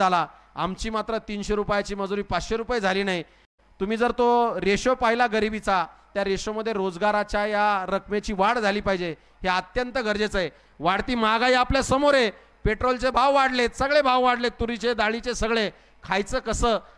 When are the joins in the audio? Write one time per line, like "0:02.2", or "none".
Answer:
none